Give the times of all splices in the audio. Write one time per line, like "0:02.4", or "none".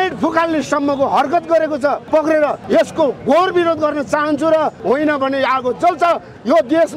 0:02.0
0:02.6
0:04.8